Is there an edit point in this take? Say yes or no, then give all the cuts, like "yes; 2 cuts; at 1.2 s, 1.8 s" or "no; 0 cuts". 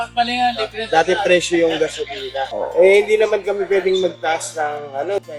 no; 0 cuts